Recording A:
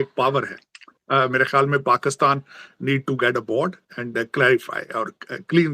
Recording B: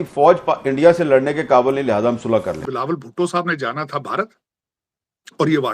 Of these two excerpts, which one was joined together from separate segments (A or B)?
B